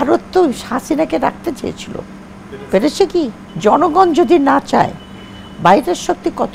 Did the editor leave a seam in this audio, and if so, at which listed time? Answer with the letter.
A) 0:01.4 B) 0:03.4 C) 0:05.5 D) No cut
B